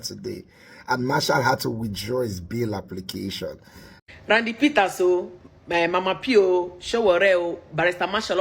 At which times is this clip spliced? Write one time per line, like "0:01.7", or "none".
0:03.9